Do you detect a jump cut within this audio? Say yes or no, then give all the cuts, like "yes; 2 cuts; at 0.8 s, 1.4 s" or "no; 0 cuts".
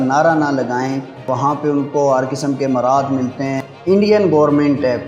yes; 2 cuts; at 1.3 s, 3.6 s